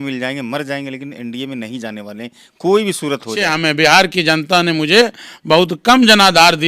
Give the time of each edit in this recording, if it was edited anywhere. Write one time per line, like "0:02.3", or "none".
0:03.5